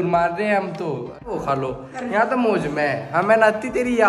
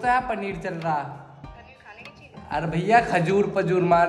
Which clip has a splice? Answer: first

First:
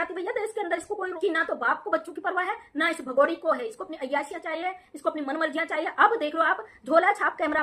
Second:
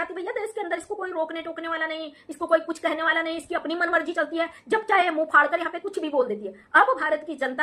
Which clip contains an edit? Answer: first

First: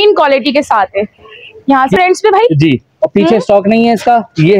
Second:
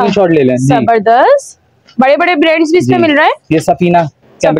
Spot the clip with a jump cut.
first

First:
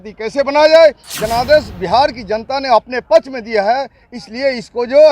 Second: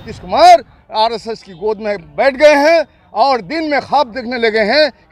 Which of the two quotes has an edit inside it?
first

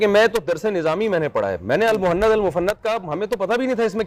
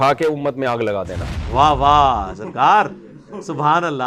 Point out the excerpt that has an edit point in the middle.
second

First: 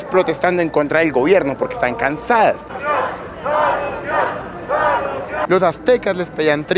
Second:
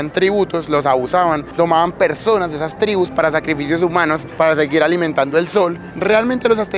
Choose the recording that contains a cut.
first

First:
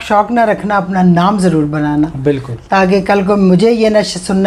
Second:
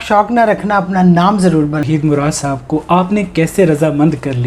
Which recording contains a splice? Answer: second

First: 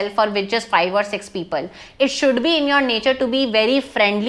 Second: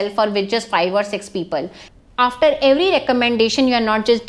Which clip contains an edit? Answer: second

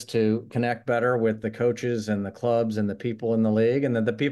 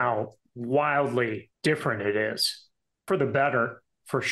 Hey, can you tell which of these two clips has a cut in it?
second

